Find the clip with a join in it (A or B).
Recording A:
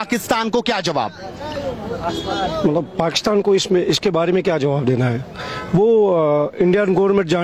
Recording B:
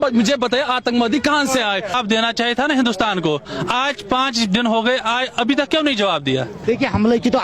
B